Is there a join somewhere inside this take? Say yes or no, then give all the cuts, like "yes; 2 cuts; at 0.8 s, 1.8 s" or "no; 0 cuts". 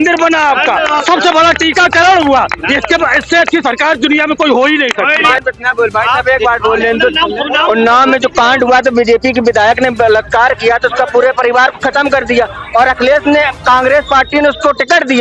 yes; 1 cut; at 5.3 s